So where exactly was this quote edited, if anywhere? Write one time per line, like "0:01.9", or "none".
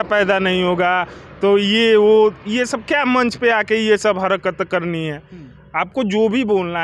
none